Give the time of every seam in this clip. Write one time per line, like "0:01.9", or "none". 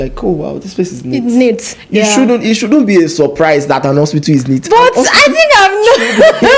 none